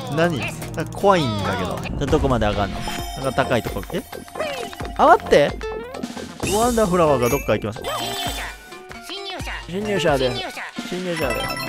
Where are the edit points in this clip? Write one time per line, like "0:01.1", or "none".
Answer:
0:01.8
0:07.8